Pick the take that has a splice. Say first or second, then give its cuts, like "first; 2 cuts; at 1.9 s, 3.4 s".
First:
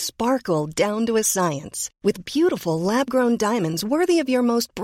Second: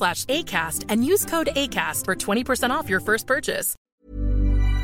second; 1 cut; at 3.8 s